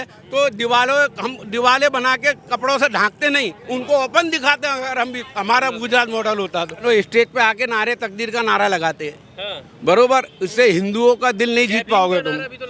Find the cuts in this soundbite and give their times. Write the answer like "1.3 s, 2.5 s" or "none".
6.8 s